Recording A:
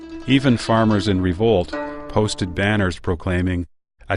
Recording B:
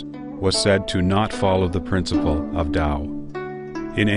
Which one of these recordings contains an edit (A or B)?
A